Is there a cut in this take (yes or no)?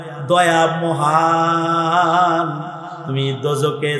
yes